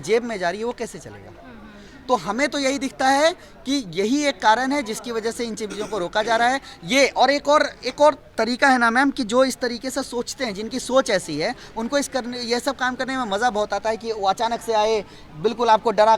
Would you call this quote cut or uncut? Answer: uncut